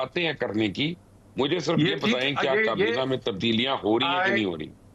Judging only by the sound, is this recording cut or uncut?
uncut